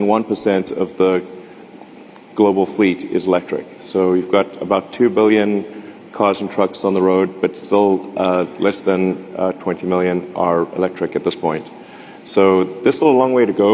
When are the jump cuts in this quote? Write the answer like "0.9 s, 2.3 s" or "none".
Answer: none